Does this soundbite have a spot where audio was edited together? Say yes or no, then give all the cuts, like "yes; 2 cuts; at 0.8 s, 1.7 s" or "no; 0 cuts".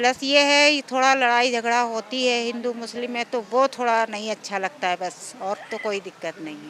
no; 0 cuts